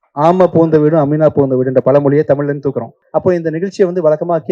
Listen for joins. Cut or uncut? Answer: cut